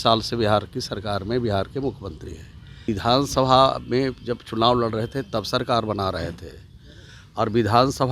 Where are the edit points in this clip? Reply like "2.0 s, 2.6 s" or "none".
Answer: 2.9 s